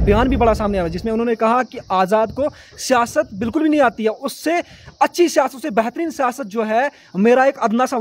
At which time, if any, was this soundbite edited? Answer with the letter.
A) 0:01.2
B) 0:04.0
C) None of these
C